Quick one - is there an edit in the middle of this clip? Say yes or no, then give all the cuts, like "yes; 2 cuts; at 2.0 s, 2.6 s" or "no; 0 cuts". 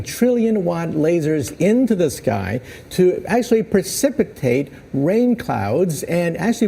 no; 0 cuts